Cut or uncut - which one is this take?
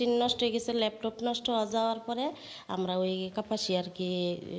uncut